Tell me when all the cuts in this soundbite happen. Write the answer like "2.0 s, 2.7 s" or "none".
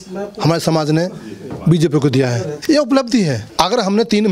2.5 s, 3.4 s